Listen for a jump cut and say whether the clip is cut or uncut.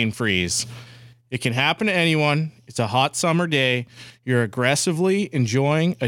uncut